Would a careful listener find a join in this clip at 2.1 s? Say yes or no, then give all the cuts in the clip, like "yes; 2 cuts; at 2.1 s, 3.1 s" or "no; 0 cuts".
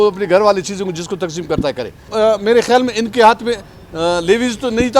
yes; 1 cut; at 2.1 s